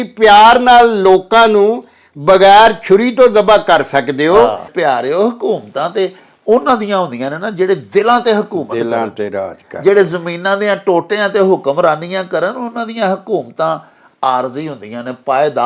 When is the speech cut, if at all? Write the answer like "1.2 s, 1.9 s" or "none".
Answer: 4.7 s